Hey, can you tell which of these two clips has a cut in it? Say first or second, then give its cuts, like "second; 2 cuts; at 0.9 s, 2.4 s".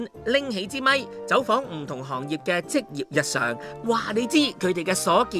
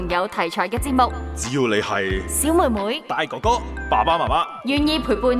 second; 1 cut; at 1.3 s